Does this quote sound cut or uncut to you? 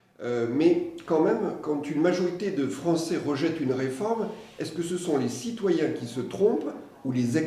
uncut